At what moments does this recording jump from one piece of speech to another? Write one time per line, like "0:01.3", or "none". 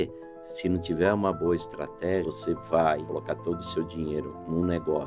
0:02.3
0:03.1